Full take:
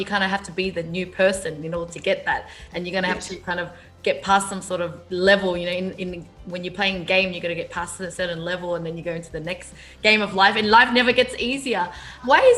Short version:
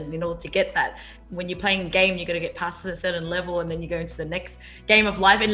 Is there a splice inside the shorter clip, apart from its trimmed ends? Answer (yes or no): yes